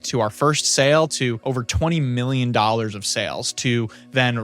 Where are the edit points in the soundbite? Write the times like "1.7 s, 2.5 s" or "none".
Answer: 1.4 s